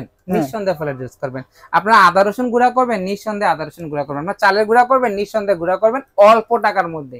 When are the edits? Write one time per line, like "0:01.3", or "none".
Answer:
none